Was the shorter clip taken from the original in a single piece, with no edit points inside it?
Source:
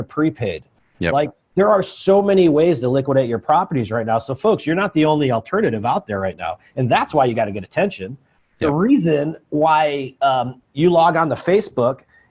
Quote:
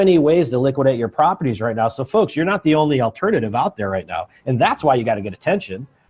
yes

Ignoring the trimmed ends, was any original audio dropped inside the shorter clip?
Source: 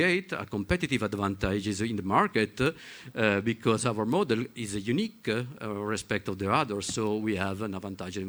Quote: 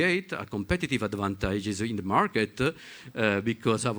no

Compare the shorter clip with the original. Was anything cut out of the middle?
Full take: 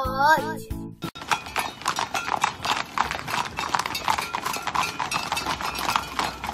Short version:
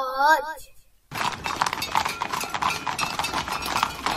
yes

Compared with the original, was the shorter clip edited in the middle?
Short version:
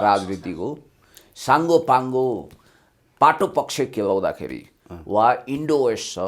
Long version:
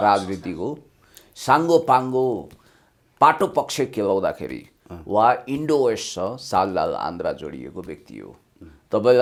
no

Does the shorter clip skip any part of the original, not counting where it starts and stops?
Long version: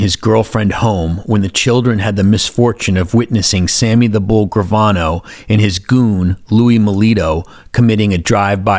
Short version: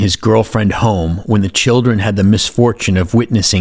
no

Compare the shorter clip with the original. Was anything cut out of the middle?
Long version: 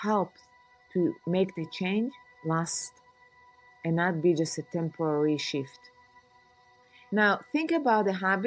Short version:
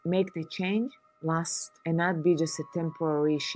yes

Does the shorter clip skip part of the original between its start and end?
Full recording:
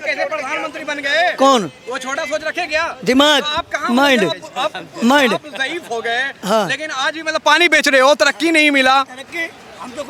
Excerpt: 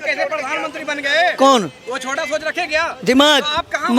no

